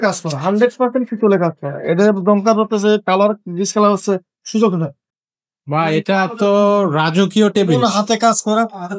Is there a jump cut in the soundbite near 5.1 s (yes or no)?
yes